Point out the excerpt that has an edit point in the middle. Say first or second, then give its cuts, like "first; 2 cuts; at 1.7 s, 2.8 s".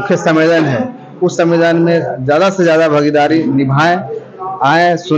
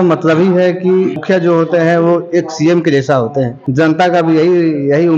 second; 2 cuts; at 1.2 s, 3.6 s